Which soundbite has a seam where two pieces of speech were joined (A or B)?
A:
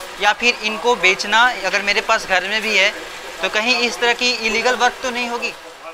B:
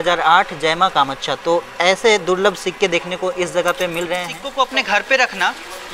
B